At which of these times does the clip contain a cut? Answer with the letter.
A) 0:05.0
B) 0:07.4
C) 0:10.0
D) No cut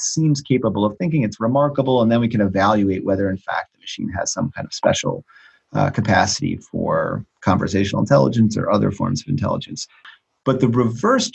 C